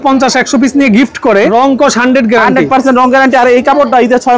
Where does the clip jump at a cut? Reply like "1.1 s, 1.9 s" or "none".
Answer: 1.5 s